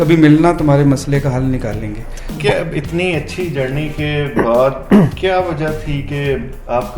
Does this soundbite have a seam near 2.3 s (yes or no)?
yes